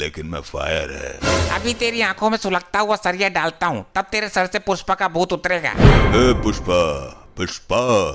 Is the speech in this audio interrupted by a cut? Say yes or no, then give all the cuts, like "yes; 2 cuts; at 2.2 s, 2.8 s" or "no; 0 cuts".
no; 0 cuts